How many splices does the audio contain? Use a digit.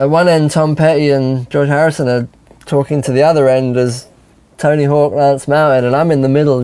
1